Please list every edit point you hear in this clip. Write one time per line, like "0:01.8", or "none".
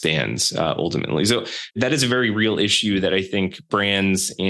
0:01.8
0:03.6